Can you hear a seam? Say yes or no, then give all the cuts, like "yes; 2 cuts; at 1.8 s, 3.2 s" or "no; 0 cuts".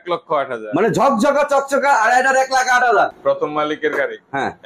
yes; 1 cut; at 3.1 s